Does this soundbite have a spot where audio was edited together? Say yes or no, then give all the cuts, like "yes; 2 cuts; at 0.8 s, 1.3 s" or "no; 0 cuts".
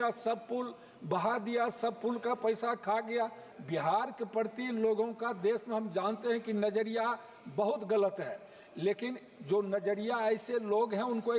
yes; 1 cut; at 3.4 s